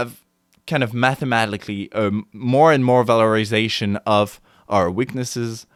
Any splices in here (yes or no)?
no